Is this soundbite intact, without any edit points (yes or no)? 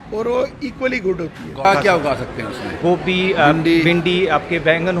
no